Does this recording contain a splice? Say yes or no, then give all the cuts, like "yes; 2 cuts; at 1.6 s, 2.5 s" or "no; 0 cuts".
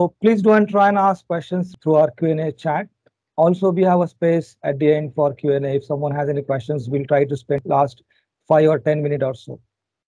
yes; 2 cuts; at 1.7 s, 7.6 s